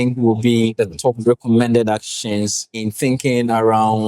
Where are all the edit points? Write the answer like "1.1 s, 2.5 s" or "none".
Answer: 0.8 s, 2.9 s